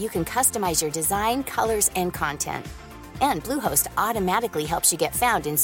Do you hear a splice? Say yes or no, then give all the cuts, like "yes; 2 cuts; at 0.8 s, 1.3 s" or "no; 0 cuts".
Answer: no; 0 cuts